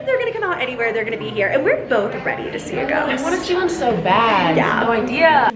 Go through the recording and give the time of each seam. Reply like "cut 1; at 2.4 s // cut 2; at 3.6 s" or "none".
none